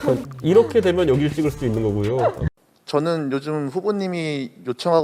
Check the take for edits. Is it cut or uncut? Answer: cut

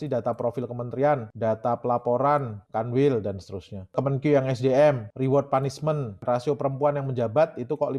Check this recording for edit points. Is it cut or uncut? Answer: cut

